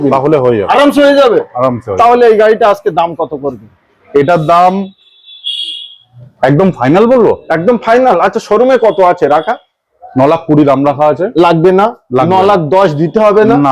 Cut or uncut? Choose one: uncut